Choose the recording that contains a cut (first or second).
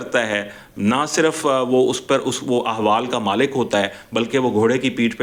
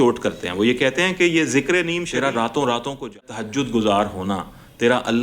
second